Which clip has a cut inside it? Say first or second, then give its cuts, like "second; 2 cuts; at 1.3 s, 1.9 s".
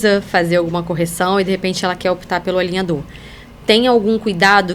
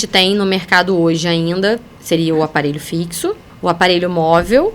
second; 2 cuts; at 1.9 s, 3.5 s